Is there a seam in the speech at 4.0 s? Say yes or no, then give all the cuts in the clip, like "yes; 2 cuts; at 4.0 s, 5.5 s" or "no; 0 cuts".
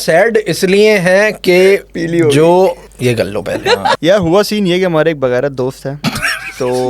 yes; 2 cuts; at 2.9 s, 4.0 s